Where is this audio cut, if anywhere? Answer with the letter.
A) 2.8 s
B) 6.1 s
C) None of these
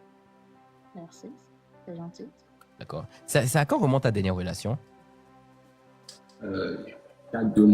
A